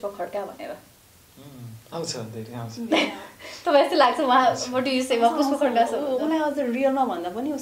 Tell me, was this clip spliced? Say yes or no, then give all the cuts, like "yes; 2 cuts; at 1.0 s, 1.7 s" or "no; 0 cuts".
no; 0 cuts